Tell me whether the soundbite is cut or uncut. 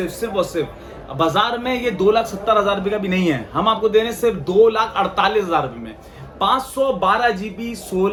uncut